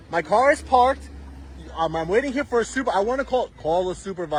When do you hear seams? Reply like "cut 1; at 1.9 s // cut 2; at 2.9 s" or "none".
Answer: none

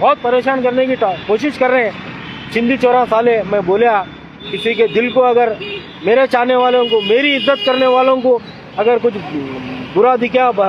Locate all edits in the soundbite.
none

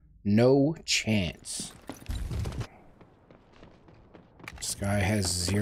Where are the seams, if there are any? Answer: cut 1; at 2.1 s

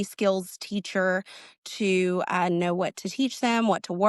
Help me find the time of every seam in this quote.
none

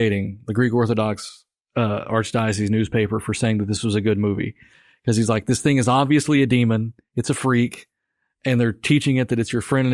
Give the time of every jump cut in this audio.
none

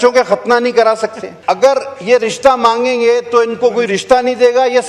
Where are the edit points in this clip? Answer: cut 1; at 1.3 s

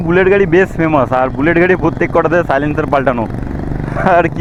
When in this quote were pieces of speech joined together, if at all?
none

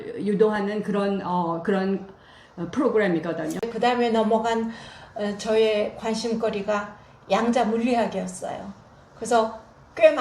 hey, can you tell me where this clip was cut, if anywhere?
cut 1; at 3.6 s

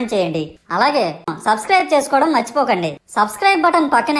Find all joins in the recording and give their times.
none

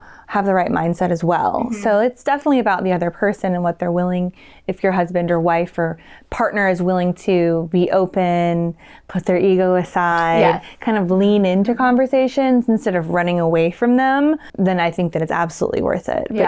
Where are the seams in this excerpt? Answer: none

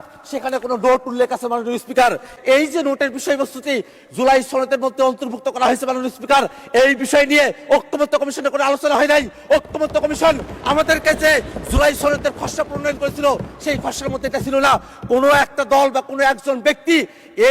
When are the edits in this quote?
cut 1; at 2.3 s

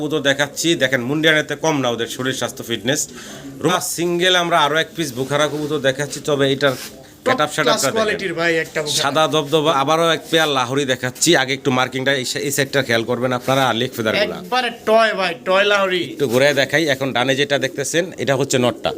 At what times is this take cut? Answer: cut 1; at 3.7 s // cut 2; at 9.7 s

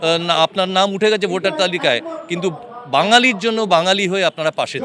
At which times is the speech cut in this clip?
none

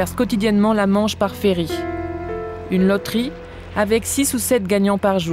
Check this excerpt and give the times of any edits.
none

